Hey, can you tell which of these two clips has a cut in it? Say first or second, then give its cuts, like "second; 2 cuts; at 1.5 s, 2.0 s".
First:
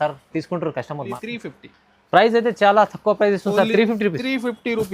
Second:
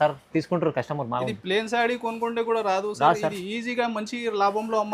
first; 1 cut; at 1.1 s